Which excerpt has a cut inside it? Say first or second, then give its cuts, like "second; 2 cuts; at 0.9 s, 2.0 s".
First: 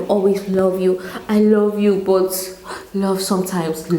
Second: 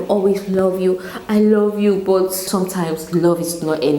second; 1 cut; at 2.4 s